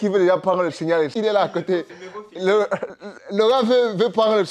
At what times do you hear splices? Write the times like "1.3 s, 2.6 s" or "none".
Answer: 1.1 s

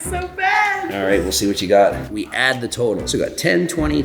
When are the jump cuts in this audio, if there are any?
0.9 s, 2.0 s

